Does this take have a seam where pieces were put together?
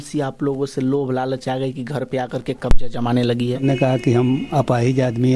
yes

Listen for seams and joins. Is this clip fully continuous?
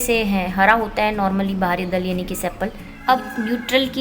no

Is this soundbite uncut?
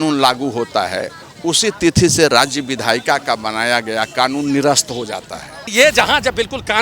no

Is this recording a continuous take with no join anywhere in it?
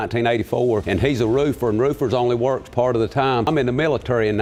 yes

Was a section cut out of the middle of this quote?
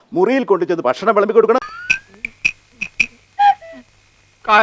no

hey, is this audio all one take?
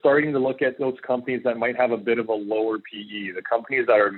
yes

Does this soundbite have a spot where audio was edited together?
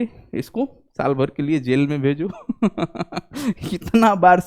no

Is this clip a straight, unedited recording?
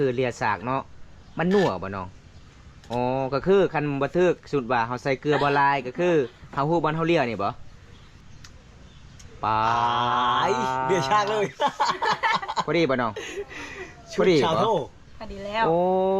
no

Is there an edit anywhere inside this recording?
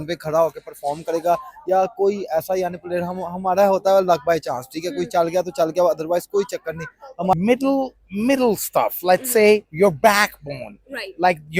yes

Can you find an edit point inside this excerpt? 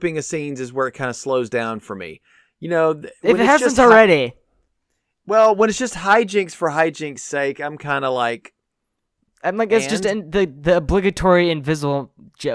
no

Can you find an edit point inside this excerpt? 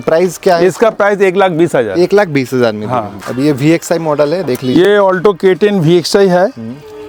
no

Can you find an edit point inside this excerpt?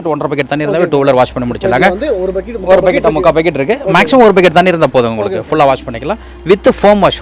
no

